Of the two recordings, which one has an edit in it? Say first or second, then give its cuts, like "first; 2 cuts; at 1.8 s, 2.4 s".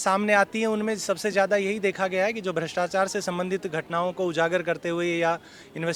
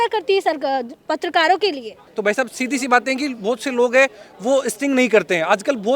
second; 1 cut; at 2.0 s